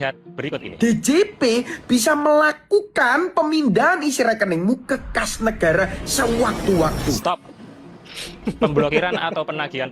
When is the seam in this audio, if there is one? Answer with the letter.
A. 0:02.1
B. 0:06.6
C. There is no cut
B